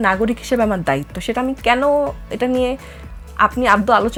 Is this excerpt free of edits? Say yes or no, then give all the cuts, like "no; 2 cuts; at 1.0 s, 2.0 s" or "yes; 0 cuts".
yes; 0 cuts